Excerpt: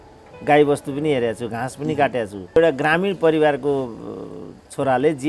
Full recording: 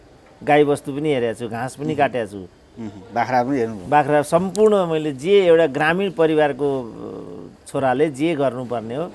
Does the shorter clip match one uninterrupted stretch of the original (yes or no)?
no